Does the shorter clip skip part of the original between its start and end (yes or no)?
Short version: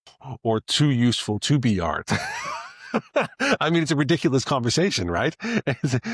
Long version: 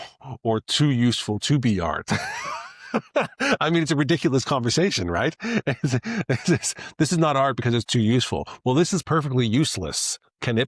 no